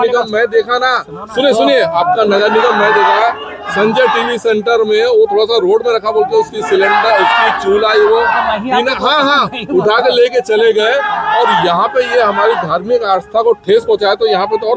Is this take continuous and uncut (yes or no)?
yes